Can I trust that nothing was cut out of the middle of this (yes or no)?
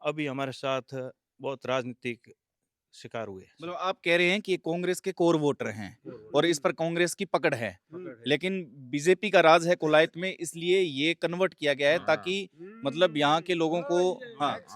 yes